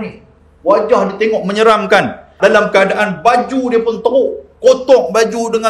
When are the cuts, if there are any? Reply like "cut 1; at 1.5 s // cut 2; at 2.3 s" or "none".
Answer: cut 1; at 2.3 s